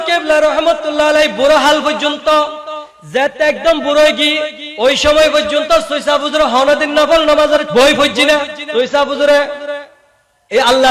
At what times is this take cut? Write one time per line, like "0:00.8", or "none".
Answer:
0:07.7
0:08.6

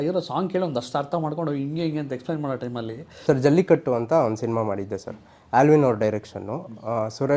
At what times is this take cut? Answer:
0:03.0

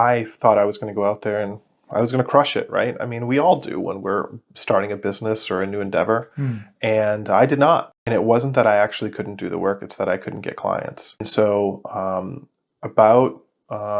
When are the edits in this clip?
0:08.0
0:11.3

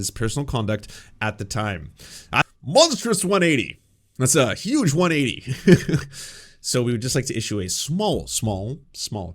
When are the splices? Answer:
0:02.4

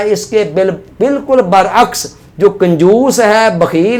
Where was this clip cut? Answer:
none

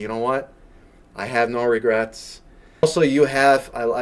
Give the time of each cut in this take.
0:02.8

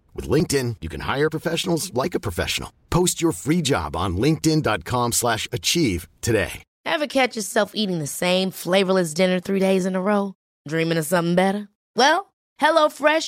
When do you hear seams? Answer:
0:06.7

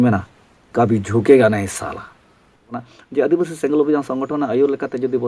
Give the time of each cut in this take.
0:02.8

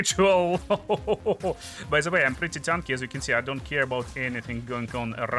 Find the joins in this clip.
none

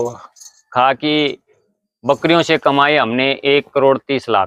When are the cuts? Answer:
none

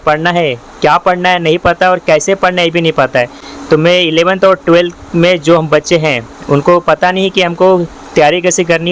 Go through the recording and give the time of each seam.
none

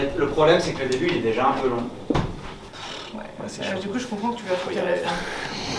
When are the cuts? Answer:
0:02.8

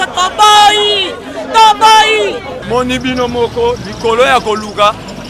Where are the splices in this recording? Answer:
0:02.5

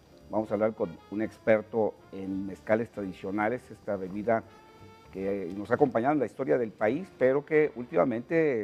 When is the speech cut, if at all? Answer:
none

